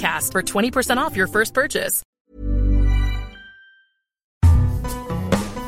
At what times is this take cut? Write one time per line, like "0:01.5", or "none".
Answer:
0:02.0
0:04.4